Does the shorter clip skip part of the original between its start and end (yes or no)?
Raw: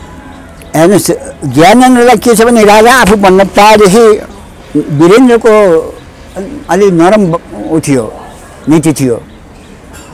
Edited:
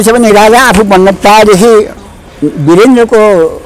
no